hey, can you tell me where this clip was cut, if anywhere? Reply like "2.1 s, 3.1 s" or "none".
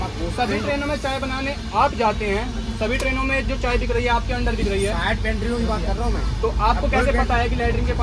none